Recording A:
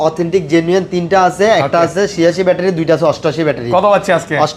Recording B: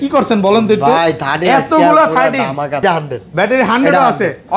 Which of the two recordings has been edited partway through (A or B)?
B